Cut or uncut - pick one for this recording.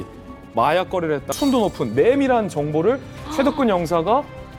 cut